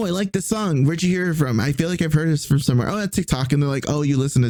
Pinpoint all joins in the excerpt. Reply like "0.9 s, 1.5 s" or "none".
none